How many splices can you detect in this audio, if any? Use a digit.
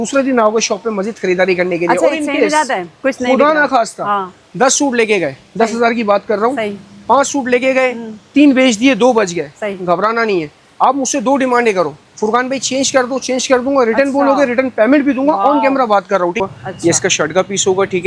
1